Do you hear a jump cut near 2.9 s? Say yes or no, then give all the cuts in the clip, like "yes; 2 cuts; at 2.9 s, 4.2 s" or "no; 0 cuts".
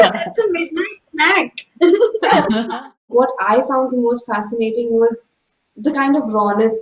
yes; 1 cut; at 2.9 s